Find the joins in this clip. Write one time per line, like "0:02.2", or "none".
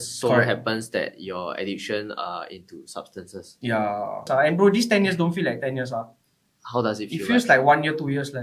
0:04.3